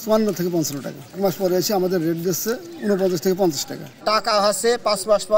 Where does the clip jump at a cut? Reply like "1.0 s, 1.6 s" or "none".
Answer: 1.2 s, 3.9 s